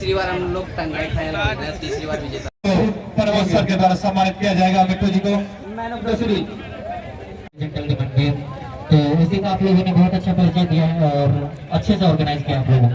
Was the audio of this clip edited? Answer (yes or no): yes